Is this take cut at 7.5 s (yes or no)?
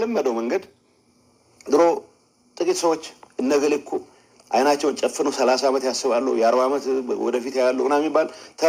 no